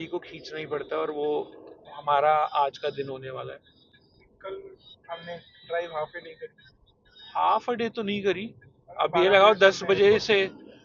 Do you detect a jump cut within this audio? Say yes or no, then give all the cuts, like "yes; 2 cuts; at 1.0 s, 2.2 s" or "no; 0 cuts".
no; 0 cuts